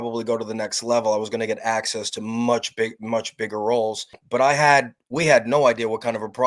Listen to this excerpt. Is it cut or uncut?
cut